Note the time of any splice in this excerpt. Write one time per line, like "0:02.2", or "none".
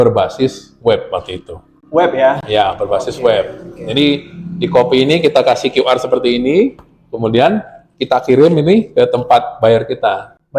none